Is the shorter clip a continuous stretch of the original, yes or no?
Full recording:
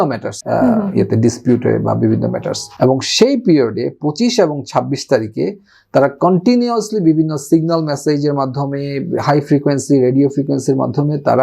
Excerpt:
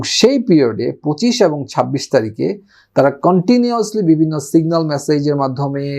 yes